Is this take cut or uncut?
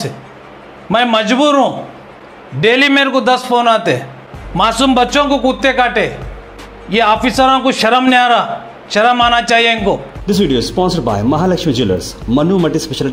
cut